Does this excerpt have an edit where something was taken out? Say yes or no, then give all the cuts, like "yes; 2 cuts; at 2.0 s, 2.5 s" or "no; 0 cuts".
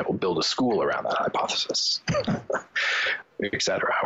yes; 1 cut; at 3.1 s